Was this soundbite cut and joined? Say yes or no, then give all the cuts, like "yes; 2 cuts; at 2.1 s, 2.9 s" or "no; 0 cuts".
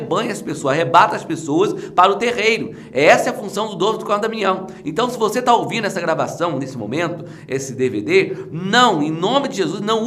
no; 0 cuts